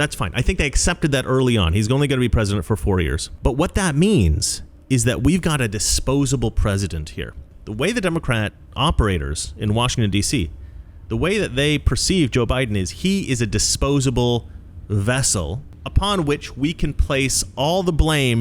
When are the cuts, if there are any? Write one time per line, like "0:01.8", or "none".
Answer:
0:03.2
0:07.5
0:15.7